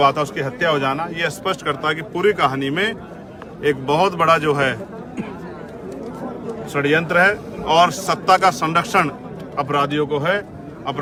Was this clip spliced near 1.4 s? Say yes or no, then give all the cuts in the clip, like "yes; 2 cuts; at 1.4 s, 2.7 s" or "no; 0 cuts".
no; 0 cuts